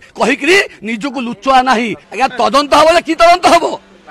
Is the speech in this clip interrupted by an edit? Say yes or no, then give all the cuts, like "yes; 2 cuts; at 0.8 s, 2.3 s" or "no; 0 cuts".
yes; 1 cut; at 2.1 s